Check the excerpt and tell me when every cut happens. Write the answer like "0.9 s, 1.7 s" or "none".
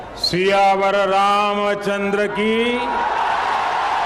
none